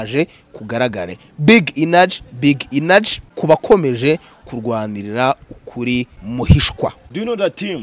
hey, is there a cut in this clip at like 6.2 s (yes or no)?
yes